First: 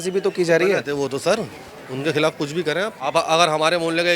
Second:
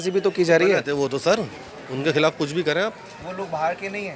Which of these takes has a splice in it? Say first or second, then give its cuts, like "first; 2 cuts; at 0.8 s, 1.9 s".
first; 1 cut; at 3.0 s